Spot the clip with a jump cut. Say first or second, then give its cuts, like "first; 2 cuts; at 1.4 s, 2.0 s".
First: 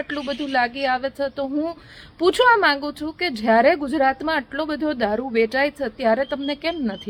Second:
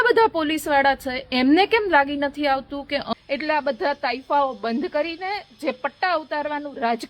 second; 1 cut; at 3.1 s